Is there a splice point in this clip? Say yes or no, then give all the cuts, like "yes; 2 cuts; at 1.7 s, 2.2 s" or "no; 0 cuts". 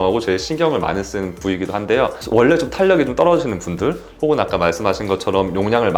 no; 0 cuts